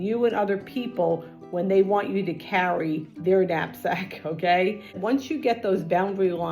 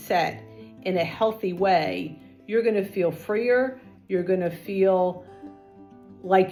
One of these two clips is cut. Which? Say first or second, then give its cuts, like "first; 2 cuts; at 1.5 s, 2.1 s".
first; 1 cut; at 5.0 s